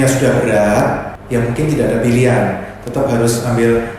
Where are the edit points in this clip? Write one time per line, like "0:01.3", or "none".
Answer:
0:01.1